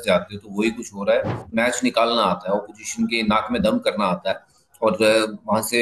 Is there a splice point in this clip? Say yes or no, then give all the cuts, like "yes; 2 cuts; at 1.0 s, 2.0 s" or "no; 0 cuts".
yes; 1 cut; at 1.4 s